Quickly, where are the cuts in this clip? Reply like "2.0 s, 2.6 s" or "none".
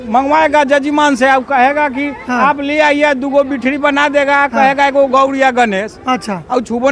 none